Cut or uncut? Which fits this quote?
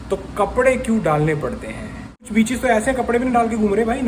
cut